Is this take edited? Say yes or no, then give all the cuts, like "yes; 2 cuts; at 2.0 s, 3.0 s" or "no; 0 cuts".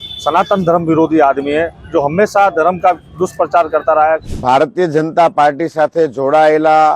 yes; 1 cut; at 4.3 s